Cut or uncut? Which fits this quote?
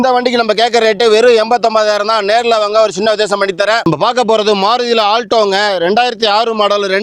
uncut